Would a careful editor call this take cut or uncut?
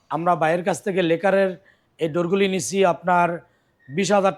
uncut